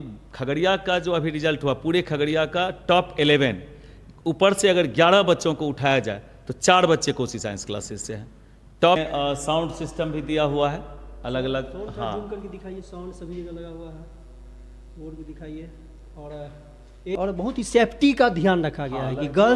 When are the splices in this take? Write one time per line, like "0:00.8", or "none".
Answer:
0:09.0
0:17.2